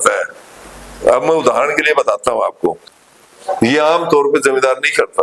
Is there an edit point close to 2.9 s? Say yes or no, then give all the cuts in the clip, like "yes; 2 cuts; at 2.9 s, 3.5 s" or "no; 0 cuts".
yes; 1 cut; at 2.9 s